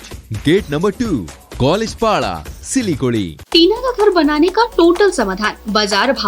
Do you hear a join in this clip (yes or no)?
yes